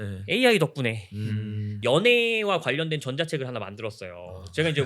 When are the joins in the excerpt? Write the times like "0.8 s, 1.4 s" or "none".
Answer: 1.7 s